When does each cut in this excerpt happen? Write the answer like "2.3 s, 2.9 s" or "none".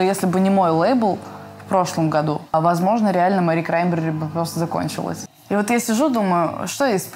2.5 s, 5.3 s